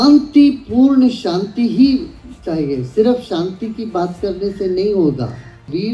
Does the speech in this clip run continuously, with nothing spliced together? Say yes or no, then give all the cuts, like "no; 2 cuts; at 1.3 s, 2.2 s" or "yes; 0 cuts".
yes; 0 cuts